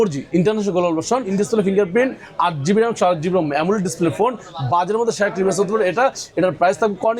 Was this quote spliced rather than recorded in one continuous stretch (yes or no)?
yes